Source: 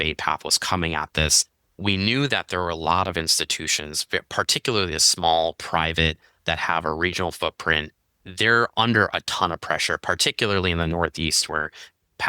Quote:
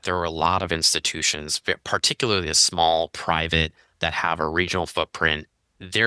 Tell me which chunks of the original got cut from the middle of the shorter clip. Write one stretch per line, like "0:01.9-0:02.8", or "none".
none